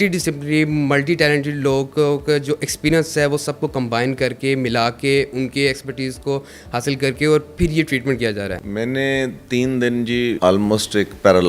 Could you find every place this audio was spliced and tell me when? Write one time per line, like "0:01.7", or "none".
0:08.6
0:10.4